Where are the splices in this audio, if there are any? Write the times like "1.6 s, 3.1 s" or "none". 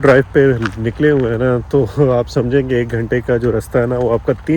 none